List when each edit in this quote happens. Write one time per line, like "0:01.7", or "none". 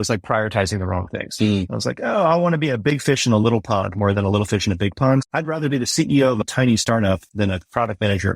0:05.2
0:06.5
0:07.2

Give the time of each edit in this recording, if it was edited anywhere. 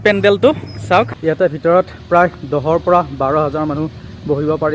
0:01.1

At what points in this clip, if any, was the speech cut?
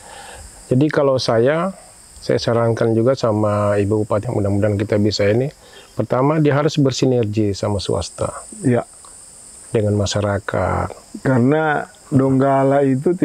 0:04.2

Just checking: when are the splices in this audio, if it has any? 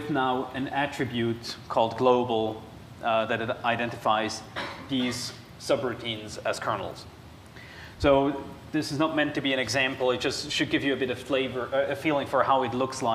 none

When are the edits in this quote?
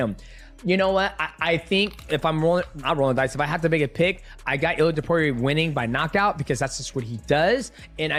none

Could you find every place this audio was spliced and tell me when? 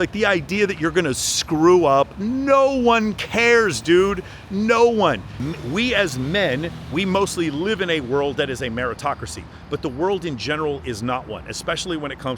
0:05.3

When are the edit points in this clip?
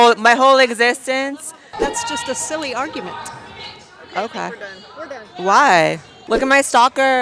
0:01.8
0:06.1

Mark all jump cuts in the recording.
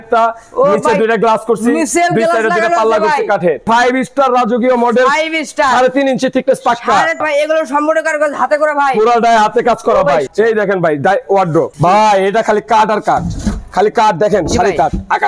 0:03.6
0:07.2
0:10.3

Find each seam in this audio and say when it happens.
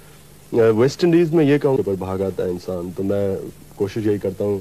0:01.8

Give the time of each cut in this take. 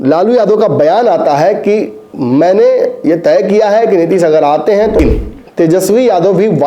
0:05.0

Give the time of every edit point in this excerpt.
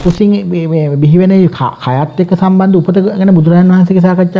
none

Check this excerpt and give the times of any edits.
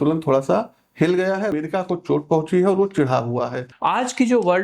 0:01.5
0:03.6

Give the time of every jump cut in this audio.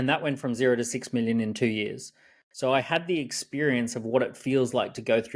none

